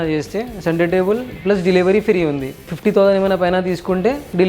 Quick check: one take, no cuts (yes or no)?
no